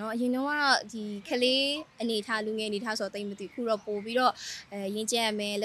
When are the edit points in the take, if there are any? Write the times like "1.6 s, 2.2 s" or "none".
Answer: none